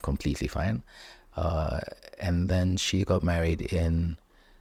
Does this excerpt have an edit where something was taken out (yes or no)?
no